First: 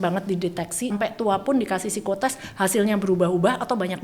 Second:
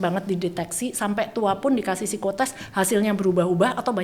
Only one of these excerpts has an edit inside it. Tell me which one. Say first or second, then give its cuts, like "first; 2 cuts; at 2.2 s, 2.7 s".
first; 1 cut; at 0.9 s